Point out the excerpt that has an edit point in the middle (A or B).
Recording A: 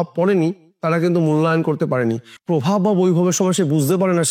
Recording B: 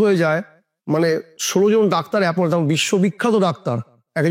A